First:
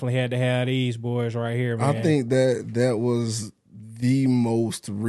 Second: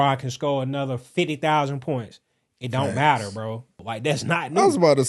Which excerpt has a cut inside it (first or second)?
second